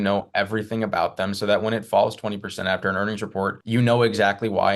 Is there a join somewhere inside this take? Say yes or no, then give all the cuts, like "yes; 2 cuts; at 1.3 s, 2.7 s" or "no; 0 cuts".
yes; 1 cut; at 3.6 s